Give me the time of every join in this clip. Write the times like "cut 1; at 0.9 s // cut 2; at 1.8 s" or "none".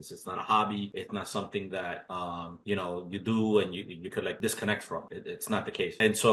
none